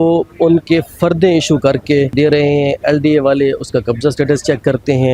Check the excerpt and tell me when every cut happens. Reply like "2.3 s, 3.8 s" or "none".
2.1 s